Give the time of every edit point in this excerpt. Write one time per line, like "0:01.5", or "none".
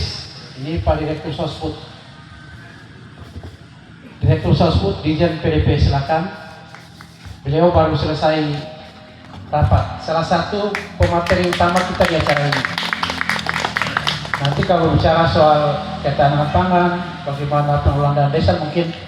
none